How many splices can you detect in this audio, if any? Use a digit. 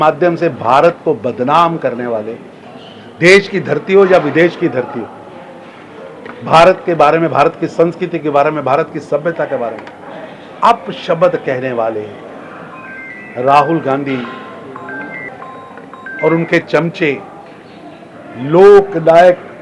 0